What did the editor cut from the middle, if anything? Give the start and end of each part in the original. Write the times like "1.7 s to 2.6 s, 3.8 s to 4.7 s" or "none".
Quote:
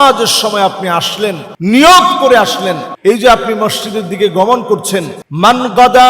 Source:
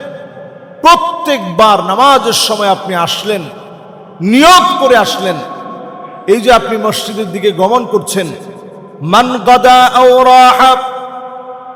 3.5 s to 4.1 s, 5.5 s to 6.1 s, 8.4 s to 8.9 s

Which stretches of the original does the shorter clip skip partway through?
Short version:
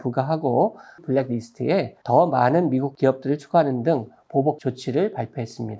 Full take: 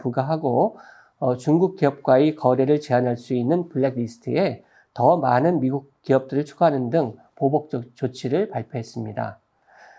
1.0 s to 3.7 s, 4.6 s to 4.9 s, 5.8 s to 6.0 s, 7.7 s to 8.0 s

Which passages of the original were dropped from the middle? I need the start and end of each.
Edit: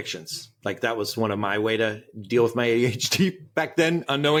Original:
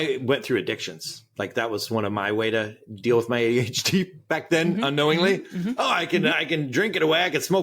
none

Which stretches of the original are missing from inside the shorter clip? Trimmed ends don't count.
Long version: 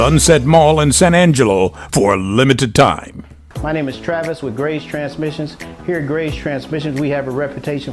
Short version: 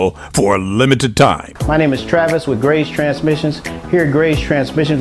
3.1 s to 3.5 s

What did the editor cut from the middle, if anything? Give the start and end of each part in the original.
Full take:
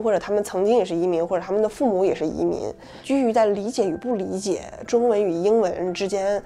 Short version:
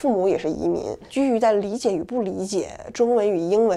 2.7 s to 2.9 s

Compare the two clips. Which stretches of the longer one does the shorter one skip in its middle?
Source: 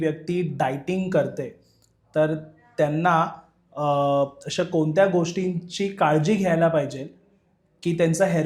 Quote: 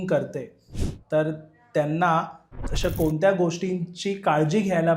3.7 s to 4.4 s

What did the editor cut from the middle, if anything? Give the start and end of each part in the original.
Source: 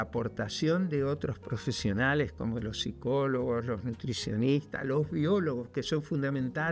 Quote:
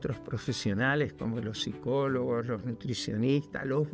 none

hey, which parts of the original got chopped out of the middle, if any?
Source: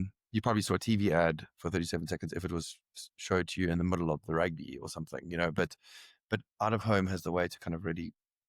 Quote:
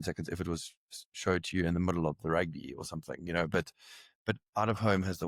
none

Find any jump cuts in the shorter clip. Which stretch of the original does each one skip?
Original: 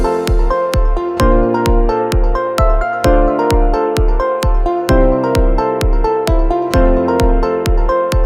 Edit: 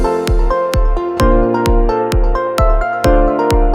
none

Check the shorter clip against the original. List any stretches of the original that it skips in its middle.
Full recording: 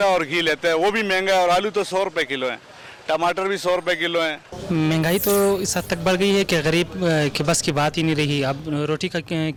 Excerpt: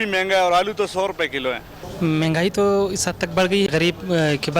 2.8 s to 4.5 s, 6.4 s to 6.6 s

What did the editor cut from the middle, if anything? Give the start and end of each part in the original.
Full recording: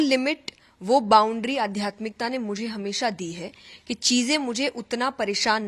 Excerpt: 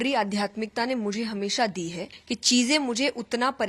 3.5 s to 3.7 s

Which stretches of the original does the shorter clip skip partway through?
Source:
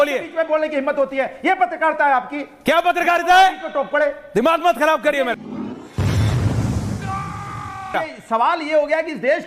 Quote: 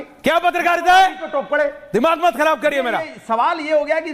5.3 s to 7.9 s

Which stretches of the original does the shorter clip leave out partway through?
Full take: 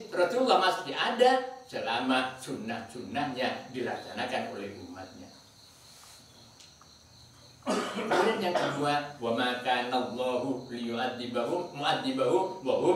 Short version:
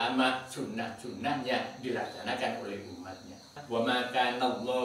5.5 s to 9.1 s

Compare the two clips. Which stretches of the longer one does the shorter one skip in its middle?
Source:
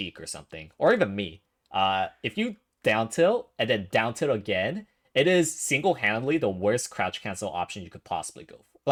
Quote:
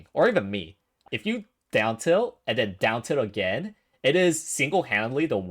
1.7 s to 2.1 s

